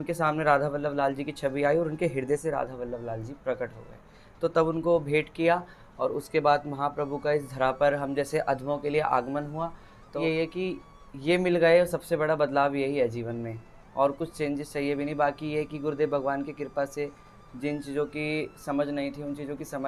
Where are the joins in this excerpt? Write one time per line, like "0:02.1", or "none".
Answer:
0:10.1